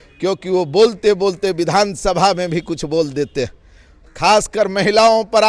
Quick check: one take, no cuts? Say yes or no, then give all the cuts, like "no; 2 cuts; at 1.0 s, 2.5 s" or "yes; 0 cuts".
yes; 0 cuts